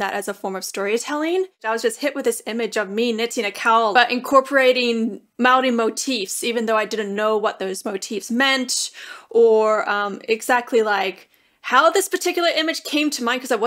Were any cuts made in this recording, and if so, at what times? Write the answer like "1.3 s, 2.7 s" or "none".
1.6 s, 3.9 s